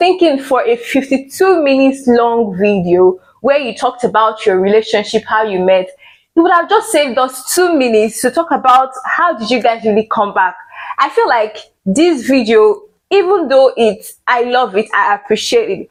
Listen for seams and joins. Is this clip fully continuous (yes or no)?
yes